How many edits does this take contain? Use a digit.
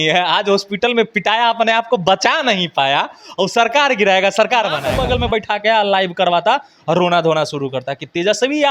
1